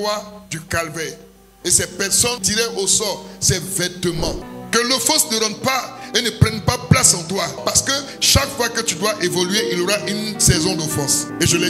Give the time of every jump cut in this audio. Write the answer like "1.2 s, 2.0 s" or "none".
4.4 s